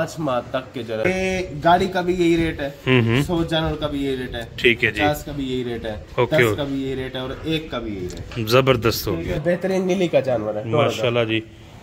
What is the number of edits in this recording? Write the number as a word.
two